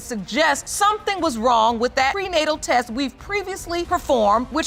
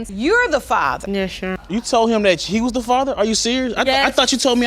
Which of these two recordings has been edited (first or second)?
second